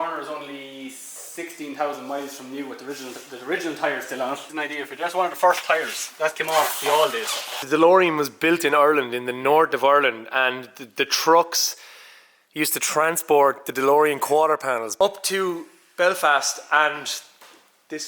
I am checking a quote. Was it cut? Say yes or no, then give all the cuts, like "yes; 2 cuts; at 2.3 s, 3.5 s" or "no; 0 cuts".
yes; 3 cuts; at 4.5 s, 7.6 s, 14.9 s